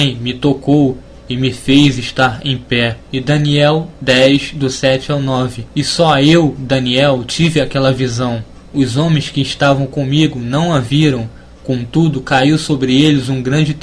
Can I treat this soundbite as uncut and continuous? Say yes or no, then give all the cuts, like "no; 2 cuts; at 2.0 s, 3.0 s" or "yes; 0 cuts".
no; 1 cut; at 7.3 s